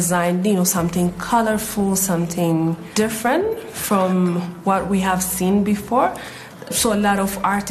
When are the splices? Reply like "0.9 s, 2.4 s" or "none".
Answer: 2.8 s, 3.7 s